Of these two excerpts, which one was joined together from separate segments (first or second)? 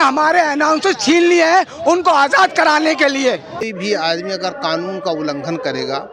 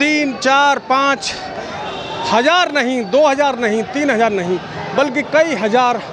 first